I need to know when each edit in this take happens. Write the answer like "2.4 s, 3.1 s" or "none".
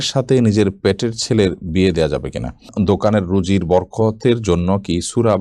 2.7 s